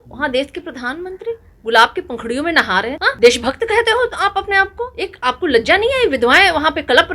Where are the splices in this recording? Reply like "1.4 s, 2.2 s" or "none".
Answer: 3.0 s, 5.0 s